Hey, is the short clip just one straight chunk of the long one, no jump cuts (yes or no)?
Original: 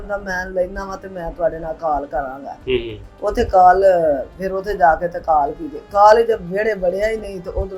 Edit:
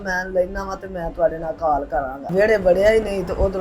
no